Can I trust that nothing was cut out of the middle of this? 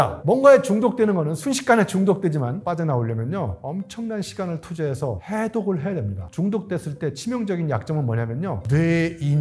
no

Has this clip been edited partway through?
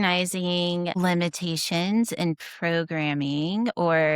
yes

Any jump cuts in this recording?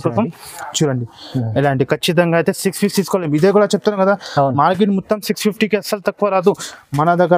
no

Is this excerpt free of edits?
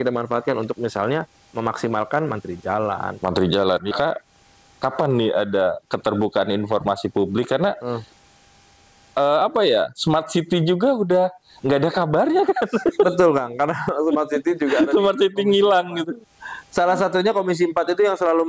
no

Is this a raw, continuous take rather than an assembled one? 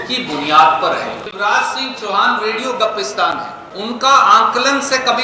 no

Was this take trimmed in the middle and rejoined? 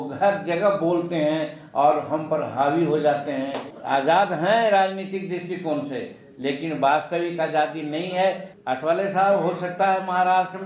yes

